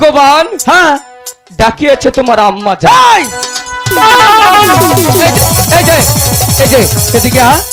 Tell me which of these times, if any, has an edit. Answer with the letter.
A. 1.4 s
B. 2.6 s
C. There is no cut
C